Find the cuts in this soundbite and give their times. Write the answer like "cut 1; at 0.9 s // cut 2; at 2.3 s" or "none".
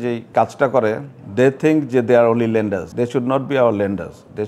none